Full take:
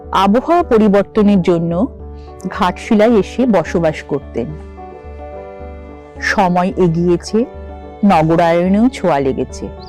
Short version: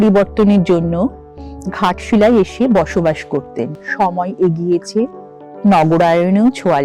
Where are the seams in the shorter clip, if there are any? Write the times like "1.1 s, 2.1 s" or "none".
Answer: 3.8 s